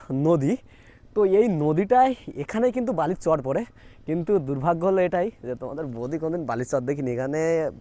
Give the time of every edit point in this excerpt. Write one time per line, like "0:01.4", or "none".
none